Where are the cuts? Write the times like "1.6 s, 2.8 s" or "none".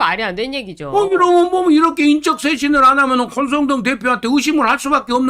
none